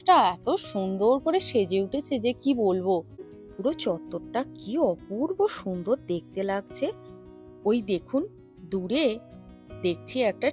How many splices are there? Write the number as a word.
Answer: one